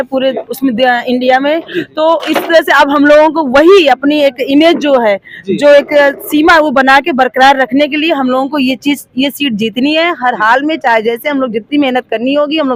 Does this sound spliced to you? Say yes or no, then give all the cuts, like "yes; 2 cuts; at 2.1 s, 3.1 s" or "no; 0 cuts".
no; 0 cuts